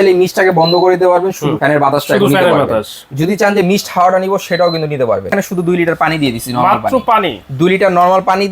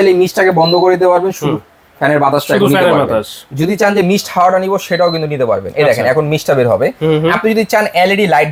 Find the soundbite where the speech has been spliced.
first; 2 cuts; at 1.5 s, 5.3 s

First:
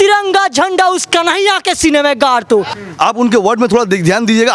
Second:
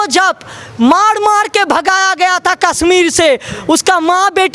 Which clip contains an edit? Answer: first; 1 cut; at 2.8 s

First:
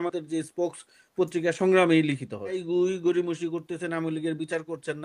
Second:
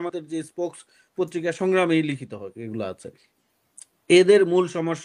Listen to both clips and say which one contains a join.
first; 1 cut; at 2.6 s

